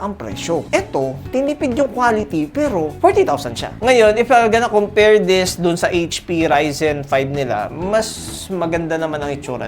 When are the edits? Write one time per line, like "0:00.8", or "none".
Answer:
0:03.7